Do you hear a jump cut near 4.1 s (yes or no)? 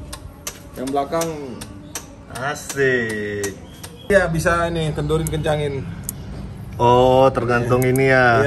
yes